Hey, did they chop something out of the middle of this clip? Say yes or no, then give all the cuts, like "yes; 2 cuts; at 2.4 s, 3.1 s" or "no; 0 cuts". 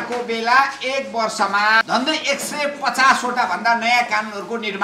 yes; 1 cut; at 1.8 s